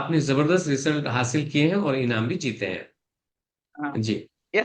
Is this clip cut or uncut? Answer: uncut